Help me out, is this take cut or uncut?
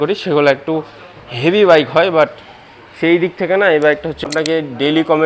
cut